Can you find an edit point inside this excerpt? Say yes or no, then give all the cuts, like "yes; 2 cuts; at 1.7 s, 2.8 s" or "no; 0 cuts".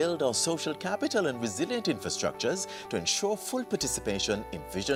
no; 0 cuts